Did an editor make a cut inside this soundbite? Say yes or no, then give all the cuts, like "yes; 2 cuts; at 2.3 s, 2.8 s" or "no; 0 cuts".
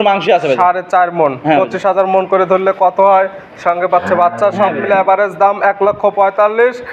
no; 0 cuts